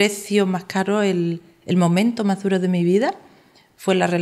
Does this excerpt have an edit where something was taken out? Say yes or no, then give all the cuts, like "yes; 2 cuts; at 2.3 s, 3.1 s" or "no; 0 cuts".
no; 0 cuts